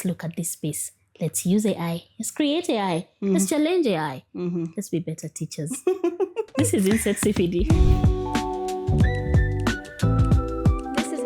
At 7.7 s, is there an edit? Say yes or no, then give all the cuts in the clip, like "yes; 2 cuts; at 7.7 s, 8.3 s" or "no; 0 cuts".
yes; 1 cut; at 7.7 s